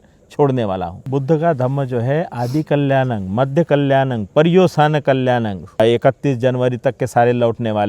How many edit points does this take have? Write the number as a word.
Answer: two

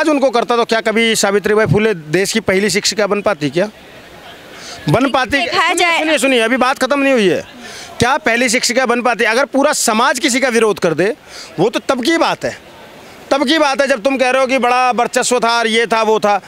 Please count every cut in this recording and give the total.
zero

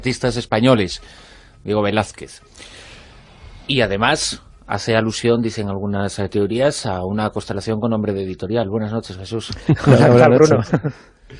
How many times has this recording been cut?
zero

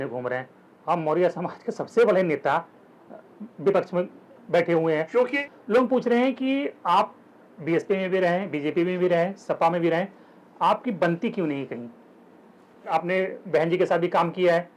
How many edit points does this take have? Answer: two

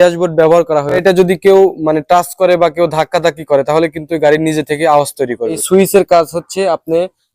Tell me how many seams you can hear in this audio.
two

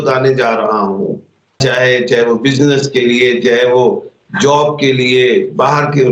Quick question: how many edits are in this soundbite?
one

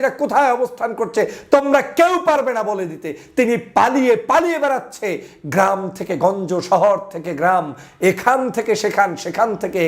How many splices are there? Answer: zero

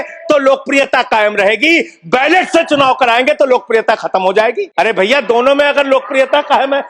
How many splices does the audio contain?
one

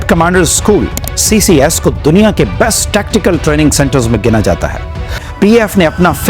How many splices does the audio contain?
one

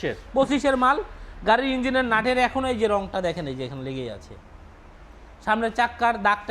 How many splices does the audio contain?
zero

